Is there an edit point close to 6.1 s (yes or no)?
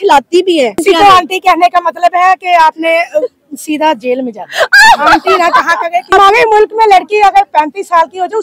yes